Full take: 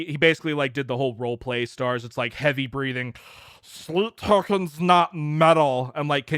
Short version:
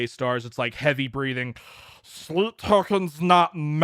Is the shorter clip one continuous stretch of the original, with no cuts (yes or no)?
yes